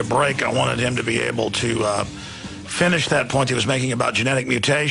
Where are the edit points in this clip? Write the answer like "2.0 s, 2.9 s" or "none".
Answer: 3.8 s